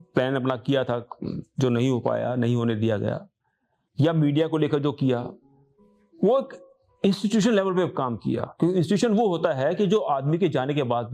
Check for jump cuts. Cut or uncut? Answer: uncut